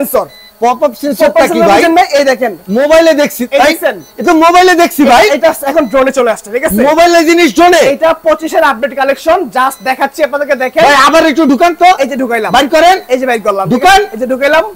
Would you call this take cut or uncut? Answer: uncut